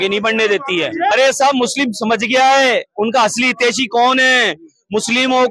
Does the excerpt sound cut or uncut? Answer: cut